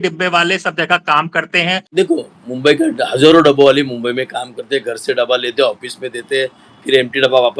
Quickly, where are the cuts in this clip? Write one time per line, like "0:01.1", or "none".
0:01.8